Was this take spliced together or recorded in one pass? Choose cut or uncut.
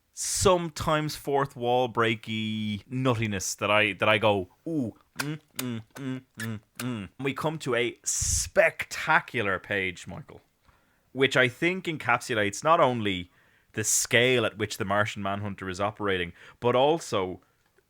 cut